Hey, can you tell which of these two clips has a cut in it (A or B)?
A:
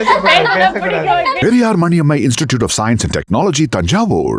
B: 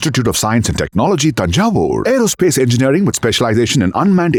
A